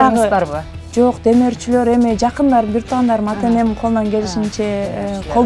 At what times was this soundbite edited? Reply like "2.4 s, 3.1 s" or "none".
none